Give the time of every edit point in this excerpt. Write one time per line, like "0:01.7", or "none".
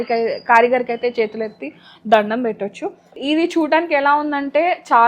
0:03.2